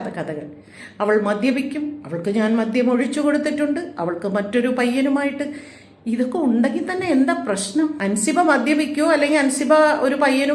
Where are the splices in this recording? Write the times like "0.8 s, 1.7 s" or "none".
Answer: 8.0 s